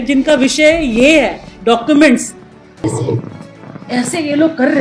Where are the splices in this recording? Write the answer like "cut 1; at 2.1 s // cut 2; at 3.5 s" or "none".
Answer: cut 1; at 2.8 s